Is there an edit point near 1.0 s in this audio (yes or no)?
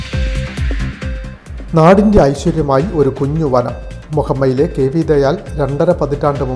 yes